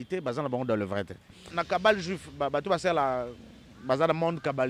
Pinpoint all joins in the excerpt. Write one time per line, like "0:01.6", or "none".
0:01.6